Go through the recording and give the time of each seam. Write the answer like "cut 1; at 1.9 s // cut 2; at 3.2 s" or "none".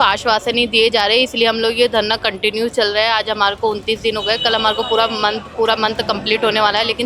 none